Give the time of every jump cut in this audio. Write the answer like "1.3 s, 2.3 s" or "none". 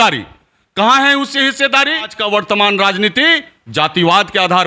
2.1 s